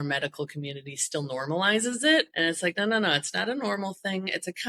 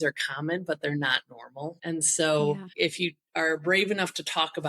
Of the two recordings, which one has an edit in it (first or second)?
second